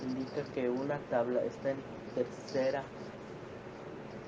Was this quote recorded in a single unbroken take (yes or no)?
yes